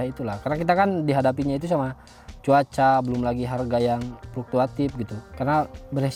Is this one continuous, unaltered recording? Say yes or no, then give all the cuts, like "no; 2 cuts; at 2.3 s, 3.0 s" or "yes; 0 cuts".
yes; 0 cuts